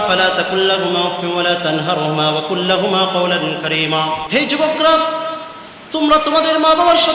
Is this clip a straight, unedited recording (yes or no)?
no